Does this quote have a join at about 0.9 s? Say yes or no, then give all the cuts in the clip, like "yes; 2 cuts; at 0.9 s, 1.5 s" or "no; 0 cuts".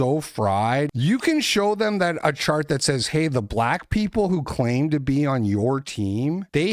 yes; 1 cut; at 0.9 s